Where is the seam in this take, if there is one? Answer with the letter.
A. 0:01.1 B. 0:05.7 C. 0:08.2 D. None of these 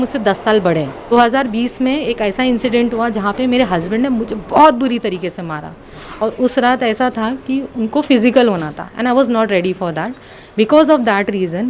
A